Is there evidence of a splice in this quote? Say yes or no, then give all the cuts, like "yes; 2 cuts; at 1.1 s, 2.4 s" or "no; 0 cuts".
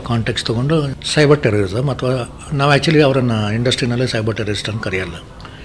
yes; 1 cut; at 1.0 s